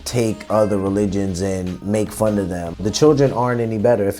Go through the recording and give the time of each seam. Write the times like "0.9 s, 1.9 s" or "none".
2.8 s